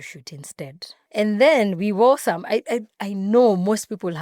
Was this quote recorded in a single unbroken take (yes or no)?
yes